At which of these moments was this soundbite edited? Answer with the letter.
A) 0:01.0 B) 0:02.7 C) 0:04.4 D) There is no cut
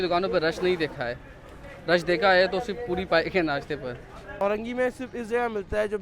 C